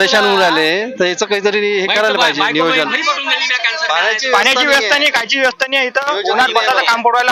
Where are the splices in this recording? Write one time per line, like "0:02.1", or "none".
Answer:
none